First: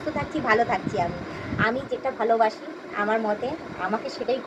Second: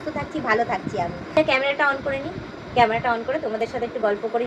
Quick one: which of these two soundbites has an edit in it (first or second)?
second